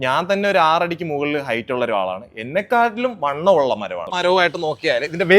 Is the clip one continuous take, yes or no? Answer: no